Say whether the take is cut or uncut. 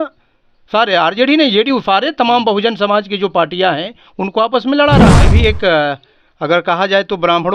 cut